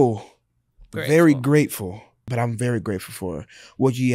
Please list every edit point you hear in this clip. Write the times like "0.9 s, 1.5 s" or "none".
2.2 s